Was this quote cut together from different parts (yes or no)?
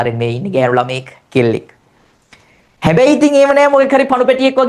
no